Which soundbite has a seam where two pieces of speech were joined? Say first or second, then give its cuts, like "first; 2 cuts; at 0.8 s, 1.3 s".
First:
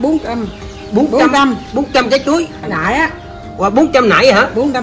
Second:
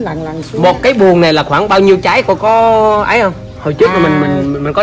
first; 1 cut; at 2.7 s